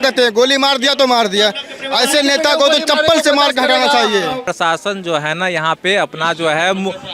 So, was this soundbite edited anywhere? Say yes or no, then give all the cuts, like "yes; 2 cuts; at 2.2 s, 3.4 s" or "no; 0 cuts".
yes; 1 cut; at 4.5 s